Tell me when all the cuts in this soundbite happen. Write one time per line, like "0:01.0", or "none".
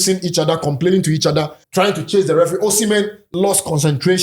0:01.6
0:03.2

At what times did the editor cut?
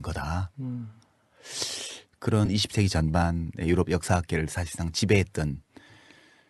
0:02.5

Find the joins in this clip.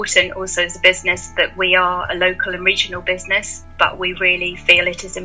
0:03.6

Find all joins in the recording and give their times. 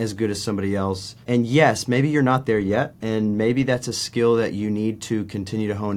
0:01.1
0:03.0

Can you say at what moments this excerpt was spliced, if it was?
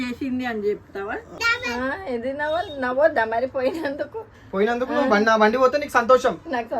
0:01.3

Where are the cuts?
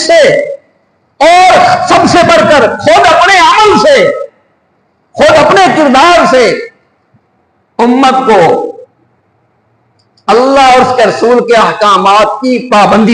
none

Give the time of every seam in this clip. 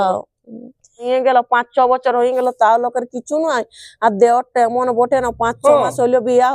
0:01.0

